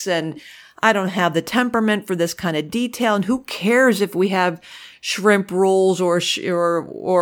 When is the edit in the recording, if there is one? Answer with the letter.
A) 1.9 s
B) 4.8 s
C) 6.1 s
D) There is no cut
D